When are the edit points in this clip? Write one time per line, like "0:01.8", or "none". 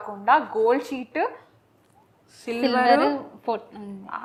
none

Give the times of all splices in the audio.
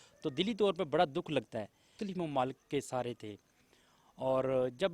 0:01.9

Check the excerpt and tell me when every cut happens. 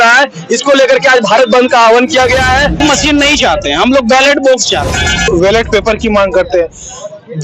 0:02.8
0:05.3

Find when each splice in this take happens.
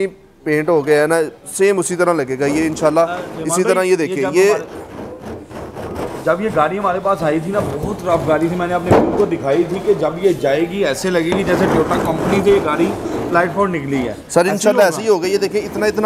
none

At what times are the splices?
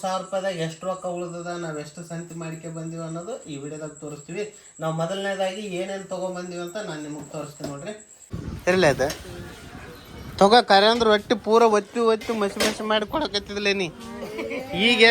0:08.2

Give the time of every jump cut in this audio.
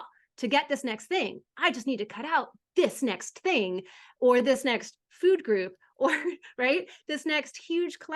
none

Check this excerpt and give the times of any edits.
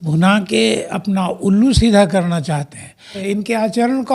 0:03.3

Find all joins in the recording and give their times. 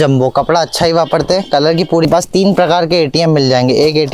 0:02.0

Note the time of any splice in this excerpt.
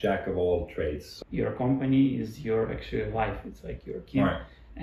0:01.1

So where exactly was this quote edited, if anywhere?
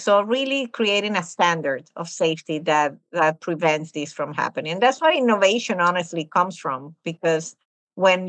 none

